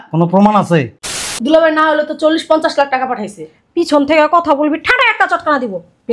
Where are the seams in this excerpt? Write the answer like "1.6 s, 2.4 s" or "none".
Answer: 1.3 s